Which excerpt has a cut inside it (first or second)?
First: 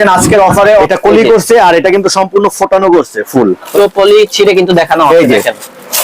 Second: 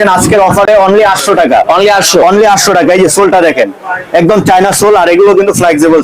first